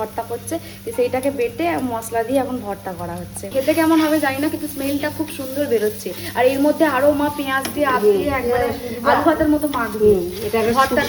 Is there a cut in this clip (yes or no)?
no